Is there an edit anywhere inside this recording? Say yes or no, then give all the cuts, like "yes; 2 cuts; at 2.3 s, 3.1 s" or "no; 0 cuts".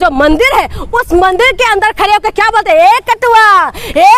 no; 0 cuts